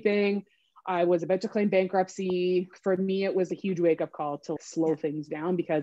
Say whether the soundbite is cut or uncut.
cut